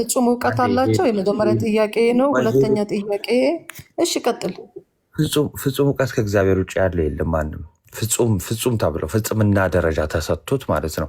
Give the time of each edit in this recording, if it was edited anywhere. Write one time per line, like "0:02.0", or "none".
none